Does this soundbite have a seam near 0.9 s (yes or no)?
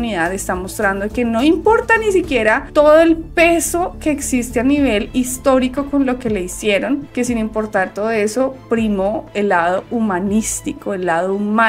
no